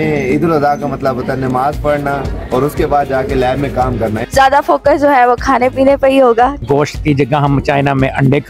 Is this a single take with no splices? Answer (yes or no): no